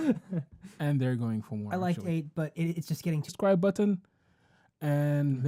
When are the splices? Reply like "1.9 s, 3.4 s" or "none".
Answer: none